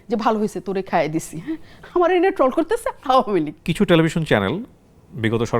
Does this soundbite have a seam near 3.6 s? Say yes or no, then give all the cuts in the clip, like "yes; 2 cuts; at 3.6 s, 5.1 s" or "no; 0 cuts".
yes; 1 cut; at 3.6 s